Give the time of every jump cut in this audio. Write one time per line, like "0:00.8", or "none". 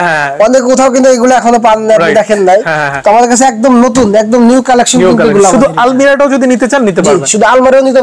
none